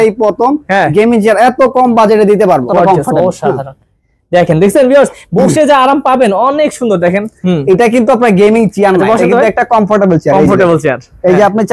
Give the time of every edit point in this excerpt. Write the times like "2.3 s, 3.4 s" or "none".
2.7 s